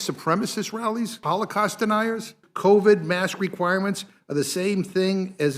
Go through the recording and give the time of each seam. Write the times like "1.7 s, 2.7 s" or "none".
1.2 s, 2.4 s